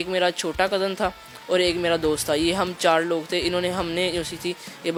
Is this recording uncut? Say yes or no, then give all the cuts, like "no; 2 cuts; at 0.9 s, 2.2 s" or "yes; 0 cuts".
yes; 0 cuts